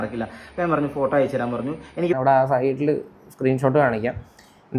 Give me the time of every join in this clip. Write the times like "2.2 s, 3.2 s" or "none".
2.2 s